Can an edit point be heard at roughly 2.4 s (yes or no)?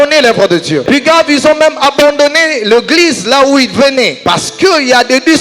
no